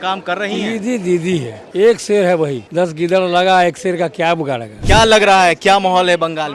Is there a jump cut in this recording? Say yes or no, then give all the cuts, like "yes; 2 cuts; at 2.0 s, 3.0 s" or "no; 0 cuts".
yes; 3 cuts; at 1.6 s, 2.6 s, 4.9 s